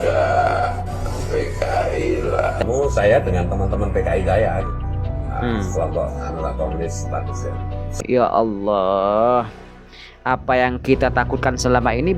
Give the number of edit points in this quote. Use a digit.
2